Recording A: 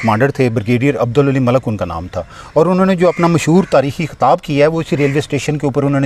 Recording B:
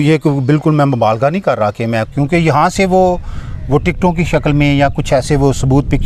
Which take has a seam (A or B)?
B